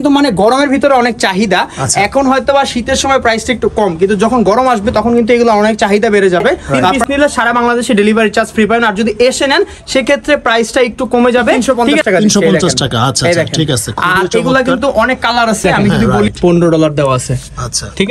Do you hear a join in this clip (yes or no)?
yes